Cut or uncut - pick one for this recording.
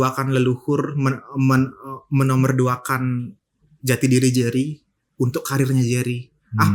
uncut